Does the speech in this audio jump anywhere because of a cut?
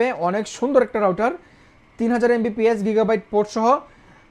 no; 0 cuts

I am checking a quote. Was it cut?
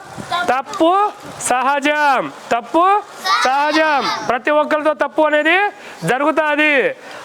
no; 0 cuts

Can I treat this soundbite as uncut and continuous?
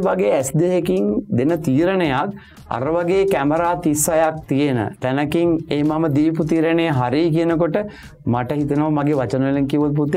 yes; 0 cuts

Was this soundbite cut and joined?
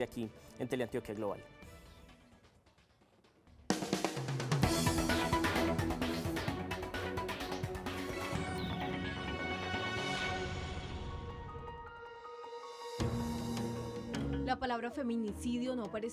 yes; 1 cut; at 7.5 s

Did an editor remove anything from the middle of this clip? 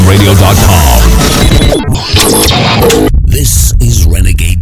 yes; 1 cut; at 1.2 s

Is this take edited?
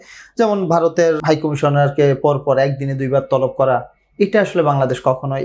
yes; 1 cut; at 1.2 s

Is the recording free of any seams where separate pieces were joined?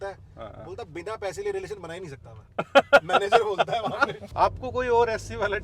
no; 1 cut; at 4.2 s

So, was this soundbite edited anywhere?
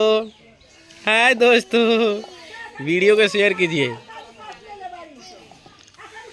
no; 0 cuts

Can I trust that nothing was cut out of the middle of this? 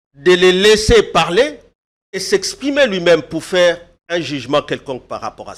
yes; 0 cuts

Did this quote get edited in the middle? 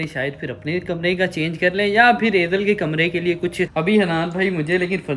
yes; 1 cut; at 3.6 s

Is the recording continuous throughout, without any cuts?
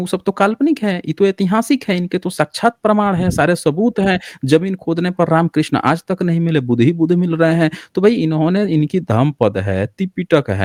yes; 0 cuts

